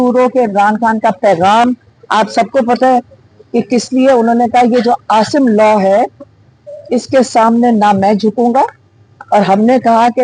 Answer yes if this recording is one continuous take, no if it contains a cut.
yes